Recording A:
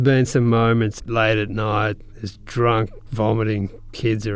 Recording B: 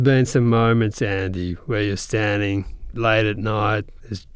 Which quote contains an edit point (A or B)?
A